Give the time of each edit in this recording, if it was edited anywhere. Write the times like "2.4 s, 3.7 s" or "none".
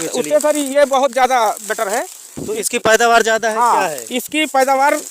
2.2 s